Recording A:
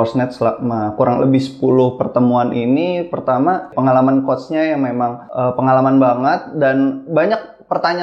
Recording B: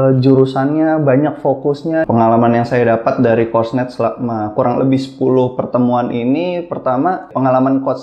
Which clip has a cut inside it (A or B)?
B